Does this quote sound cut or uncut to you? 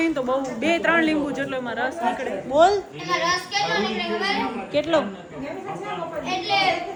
uncut